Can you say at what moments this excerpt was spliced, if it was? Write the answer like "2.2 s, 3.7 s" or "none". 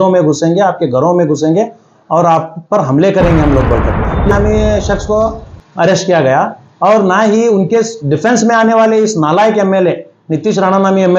4.3 s